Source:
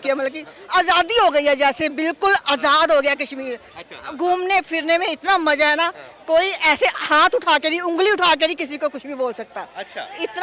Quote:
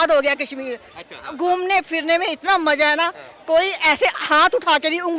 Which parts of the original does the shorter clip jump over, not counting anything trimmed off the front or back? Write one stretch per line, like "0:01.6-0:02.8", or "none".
none